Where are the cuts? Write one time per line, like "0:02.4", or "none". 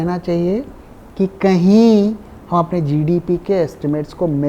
none